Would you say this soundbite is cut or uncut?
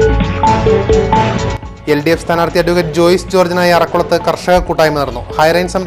uncut